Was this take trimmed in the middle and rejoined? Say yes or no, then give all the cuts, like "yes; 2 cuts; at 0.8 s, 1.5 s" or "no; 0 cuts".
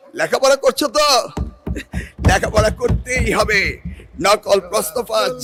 no; 0 cuts